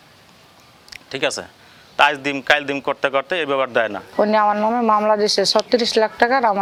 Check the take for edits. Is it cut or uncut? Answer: uncut